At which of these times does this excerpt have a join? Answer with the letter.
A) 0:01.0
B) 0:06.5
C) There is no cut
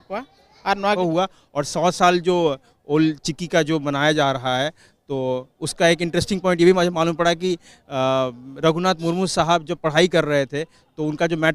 A